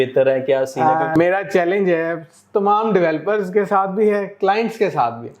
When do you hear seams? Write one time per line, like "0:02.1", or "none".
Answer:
0:01.1

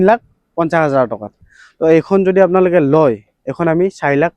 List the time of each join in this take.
0:01.3

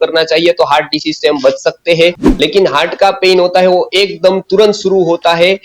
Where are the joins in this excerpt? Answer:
0:02.2

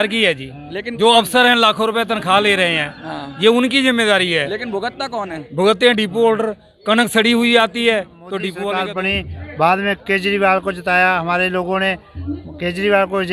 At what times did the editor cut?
0:08.8

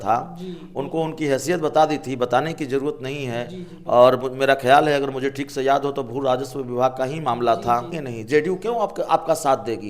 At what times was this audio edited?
0:08.0

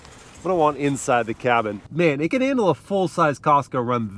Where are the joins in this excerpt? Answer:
0:01.8

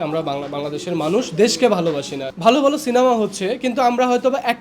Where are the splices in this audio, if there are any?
0:02.2

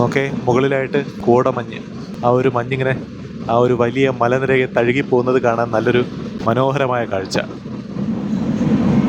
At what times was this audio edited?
0:01.1
0:02.1

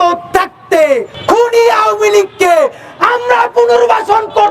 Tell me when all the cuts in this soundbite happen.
0:01.1

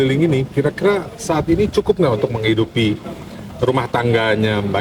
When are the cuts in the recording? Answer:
none

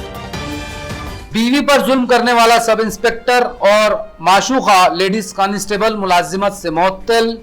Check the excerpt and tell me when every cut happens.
0:01.0

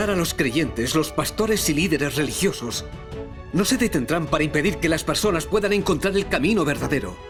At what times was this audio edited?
none

